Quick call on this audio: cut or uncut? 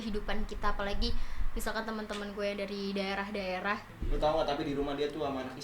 cut